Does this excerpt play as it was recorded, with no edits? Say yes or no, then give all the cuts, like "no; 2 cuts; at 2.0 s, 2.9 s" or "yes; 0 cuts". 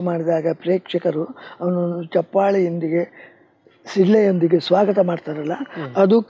yes; 0 cuts